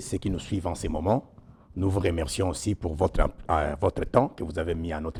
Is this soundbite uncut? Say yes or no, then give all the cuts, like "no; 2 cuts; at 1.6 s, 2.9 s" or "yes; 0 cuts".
yes; 0 cuts